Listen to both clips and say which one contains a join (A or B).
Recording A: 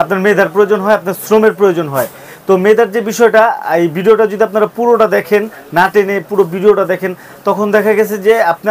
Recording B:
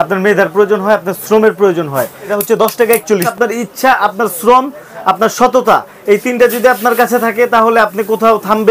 B